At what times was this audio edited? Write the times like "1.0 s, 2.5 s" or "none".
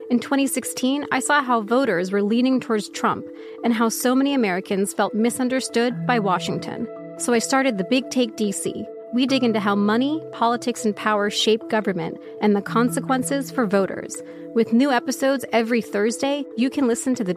none